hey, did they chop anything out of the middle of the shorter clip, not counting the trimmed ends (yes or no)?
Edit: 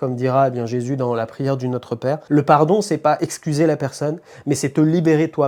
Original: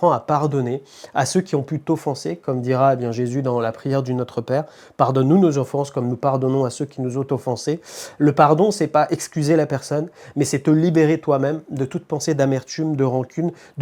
yes